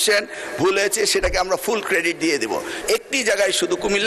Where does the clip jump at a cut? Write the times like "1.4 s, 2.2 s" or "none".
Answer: 2.7 s